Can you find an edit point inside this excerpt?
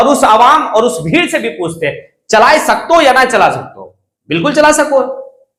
no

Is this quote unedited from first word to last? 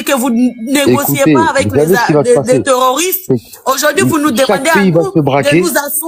yes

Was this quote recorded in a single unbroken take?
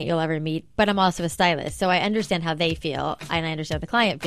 yes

